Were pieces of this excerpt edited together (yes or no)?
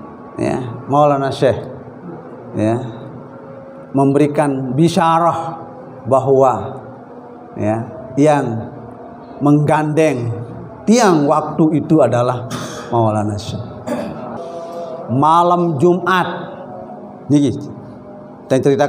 yes